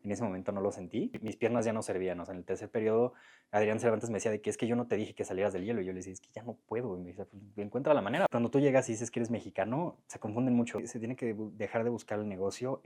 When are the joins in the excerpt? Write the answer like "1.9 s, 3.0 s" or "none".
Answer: 1.2 s, 8.3 s, 10.8 s

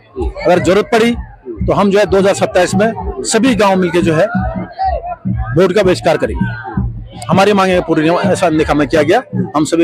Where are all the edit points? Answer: none

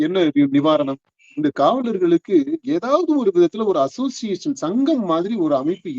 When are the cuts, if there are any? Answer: 1.3 s

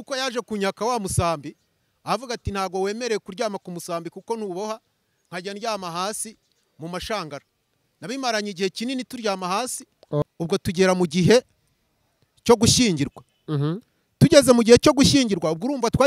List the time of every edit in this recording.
10.2 s

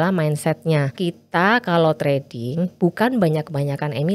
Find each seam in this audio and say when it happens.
1.0 s

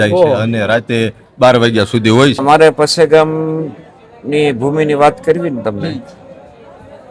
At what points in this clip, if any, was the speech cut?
2.4 s

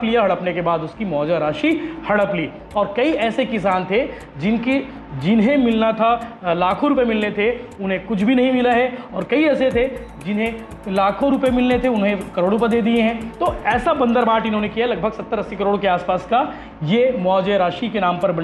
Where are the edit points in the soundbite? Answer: none

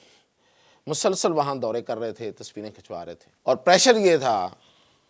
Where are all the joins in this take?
3.3 s

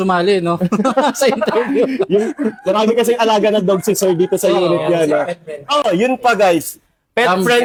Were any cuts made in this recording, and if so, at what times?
none

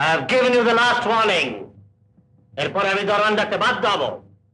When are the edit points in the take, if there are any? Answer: none

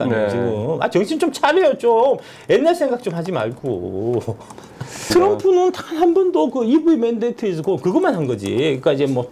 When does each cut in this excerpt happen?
5.1 s

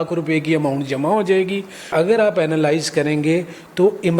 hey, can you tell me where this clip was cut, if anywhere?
1.9 s

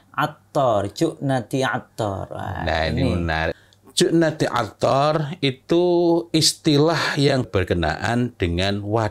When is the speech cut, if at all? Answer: 3.6 s, 7.5 s

